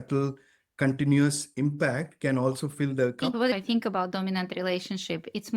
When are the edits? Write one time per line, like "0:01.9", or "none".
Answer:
0:03.2

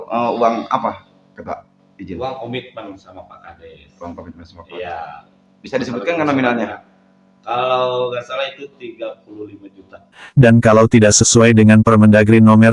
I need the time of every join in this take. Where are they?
0:10.2

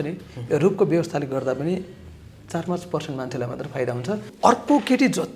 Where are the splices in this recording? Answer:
0:04.3

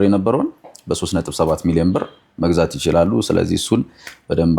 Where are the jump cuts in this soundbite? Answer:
none

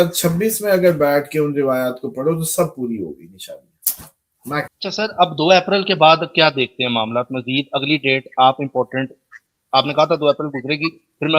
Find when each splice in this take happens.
0:04.7

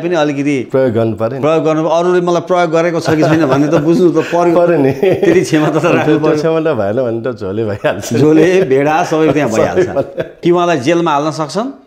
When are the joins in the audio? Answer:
0:10.3

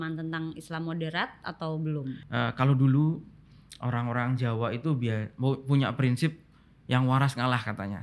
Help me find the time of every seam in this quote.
0:02.2

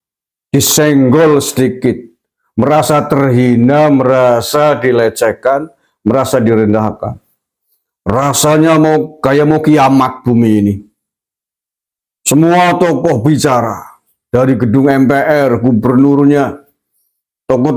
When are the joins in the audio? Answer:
none

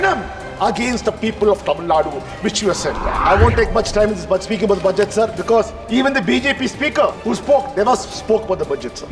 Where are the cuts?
0:03.1
0:07.2

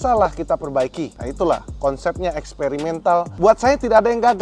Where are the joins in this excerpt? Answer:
0:01.2
0:03.3

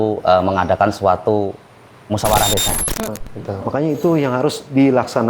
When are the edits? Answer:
0:03.1

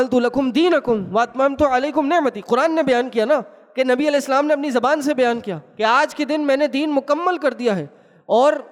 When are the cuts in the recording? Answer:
none

